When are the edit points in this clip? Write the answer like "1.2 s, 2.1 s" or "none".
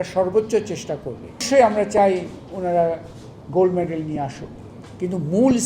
1.4 s